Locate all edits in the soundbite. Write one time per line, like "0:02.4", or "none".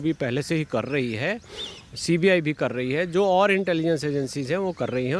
none